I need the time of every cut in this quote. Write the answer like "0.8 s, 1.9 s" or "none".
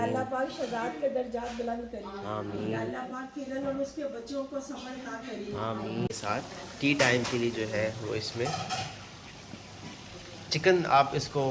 6.1 s